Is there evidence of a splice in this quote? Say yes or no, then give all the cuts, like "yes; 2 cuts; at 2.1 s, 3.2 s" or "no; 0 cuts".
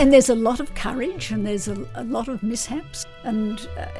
yes; 1 cut; at 2.9 s